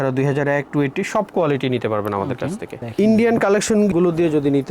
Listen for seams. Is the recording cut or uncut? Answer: cut